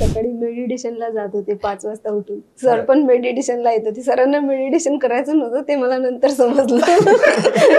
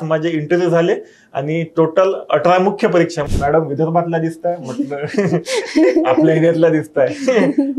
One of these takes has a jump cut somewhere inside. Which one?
second; 1 cut; at 3.2 s

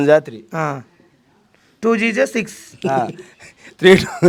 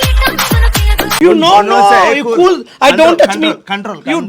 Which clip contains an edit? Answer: second; 1 cut; at 1.2 s

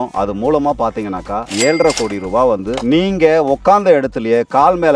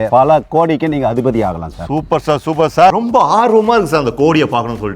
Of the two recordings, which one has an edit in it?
second; 1 cut; at 2.9 s

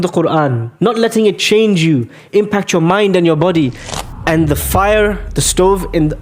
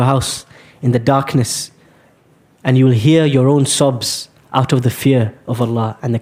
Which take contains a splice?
first; 1 cut; at 3.9 s

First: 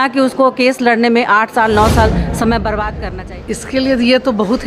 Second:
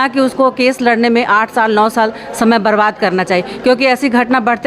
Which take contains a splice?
first; 1 cut; at 3.0 s

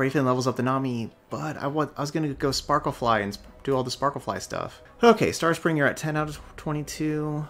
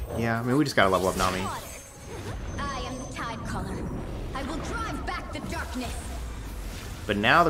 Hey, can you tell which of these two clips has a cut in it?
first; 1 cut; at 4.8 s

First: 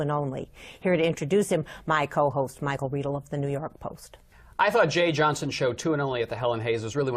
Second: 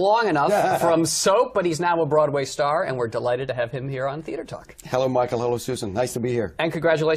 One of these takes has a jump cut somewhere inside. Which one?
first; 1 cut; at 3.3 s

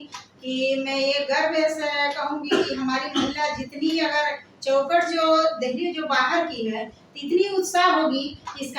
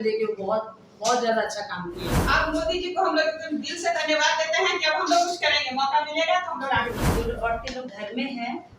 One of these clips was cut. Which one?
second; 2 cuts; at 2.1 s, 7.0 s

